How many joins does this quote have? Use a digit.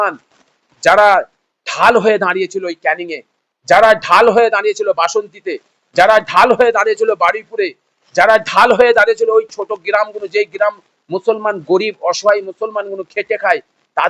0